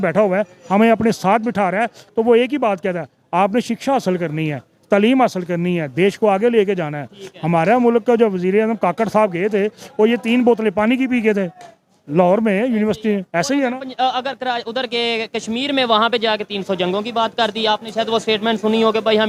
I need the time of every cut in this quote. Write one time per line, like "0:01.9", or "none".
none

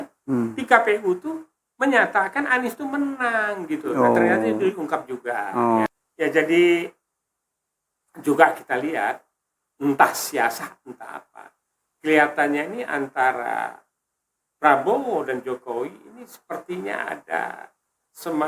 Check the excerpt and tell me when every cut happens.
0:05.9

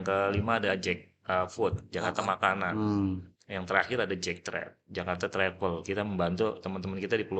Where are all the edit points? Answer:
0:03.3

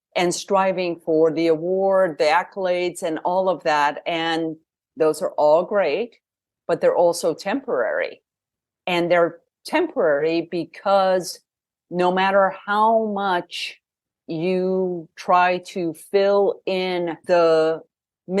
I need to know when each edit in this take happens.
0:17.2

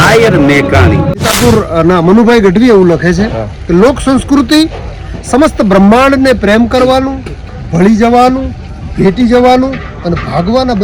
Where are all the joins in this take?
0:01.2

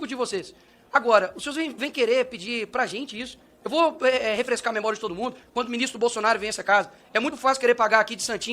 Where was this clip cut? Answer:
0:05.4

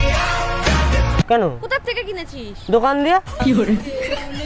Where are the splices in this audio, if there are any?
0:01.3

